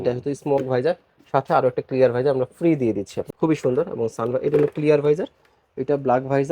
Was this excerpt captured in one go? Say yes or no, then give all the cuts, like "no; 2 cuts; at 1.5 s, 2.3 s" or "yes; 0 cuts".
no; 1 cut; at 3.1 s